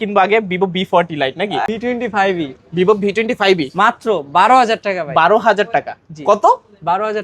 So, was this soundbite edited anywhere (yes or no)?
yes